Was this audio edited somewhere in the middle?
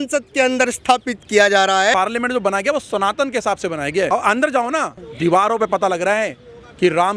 yes; 3 cuts; at 1.9 s, 4.1 s, 5.0 s

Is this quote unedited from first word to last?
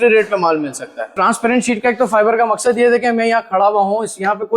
no; 1 cut; at 1.2 s

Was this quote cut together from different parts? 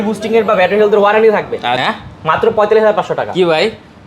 yes; 1 cut; at 1.7 s

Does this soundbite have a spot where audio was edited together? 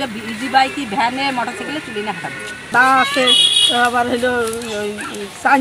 yes; 1 cut; at 2.6 s

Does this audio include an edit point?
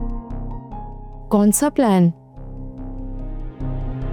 no; 0 cuts

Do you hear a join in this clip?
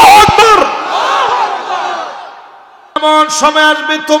yes; 1 cut; at 3.0 s

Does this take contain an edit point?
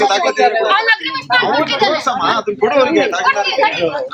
no; 0 cuts

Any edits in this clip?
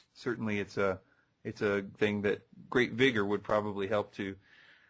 yes; 1 cut; at 1.9 s

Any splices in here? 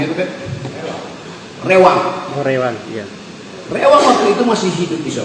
no; 0 cuts

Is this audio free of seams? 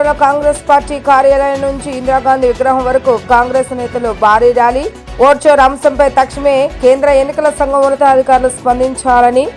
yes; 0 cuts

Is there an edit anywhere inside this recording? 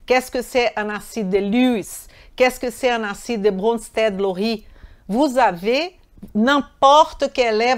no; 0 cuts

